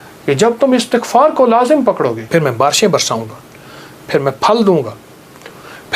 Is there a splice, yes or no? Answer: yes